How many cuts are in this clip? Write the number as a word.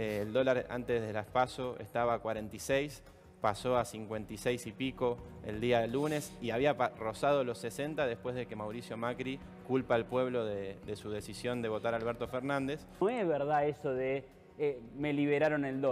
one